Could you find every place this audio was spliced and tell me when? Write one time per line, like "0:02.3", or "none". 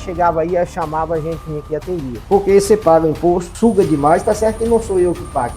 0:02.2
0:03.5